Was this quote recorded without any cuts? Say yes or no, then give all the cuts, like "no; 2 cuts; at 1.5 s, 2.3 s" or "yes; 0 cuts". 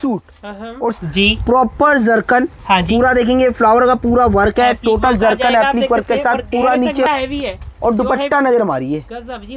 no; 2 cuts; at 1.0 s, 7.1 s